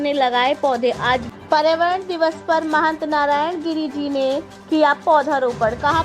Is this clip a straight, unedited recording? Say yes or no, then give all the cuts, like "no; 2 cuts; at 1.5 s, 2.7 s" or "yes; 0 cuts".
no; 1 cut; at 1.3 s